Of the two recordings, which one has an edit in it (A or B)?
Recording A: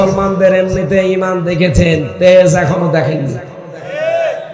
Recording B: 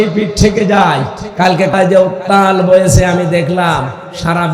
B